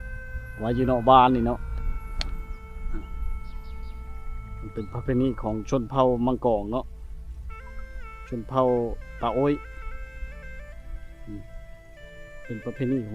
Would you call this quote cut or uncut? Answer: uncut